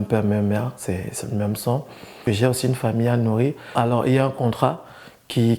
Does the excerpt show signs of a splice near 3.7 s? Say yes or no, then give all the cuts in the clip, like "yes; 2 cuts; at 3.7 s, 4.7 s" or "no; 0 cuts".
yes; 2 cuts; at 2.1 s, 3.7 s